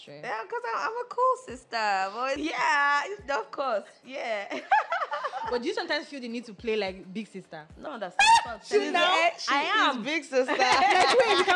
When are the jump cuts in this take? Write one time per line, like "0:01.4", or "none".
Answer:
0:02.4
0:07.7

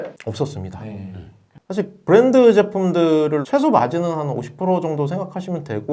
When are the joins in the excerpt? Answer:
0:01.5
0:03.4

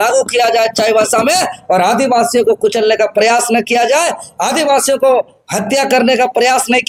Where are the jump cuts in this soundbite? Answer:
none

